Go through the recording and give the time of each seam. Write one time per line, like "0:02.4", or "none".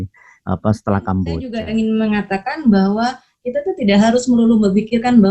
0:01.5